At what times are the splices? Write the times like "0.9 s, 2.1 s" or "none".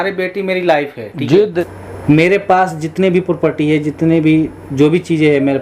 1.5 s